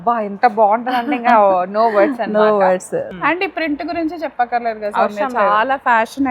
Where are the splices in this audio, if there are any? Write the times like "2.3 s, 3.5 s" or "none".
3.1 s